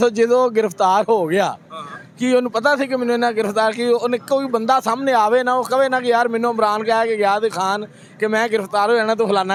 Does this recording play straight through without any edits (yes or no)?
yes